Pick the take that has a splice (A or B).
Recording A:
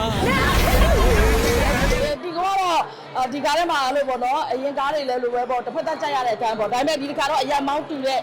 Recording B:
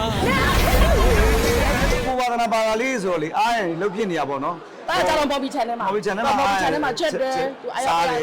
A